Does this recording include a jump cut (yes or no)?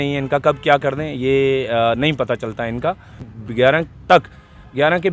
yes